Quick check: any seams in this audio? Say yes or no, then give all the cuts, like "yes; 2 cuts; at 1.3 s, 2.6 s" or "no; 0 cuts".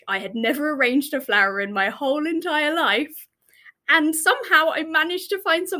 no; 0 cuts